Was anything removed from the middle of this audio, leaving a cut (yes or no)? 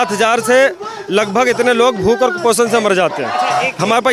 no